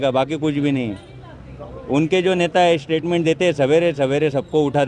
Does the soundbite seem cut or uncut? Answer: uncut